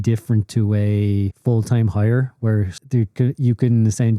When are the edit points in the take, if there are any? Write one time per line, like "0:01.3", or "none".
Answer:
0:01.3
0:02.8